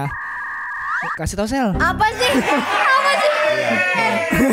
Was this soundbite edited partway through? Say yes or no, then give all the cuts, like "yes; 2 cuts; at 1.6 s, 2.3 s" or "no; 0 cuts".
no; 0 cuts